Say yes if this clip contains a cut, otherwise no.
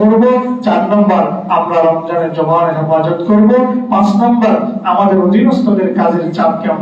no